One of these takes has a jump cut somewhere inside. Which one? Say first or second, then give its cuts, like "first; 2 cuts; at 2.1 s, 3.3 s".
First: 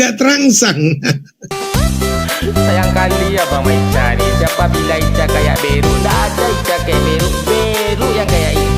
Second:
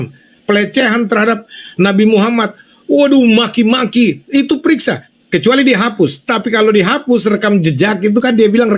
first; 1 cut; at 1.4 s